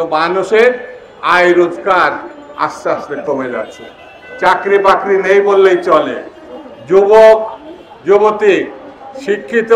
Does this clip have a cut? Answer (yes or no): no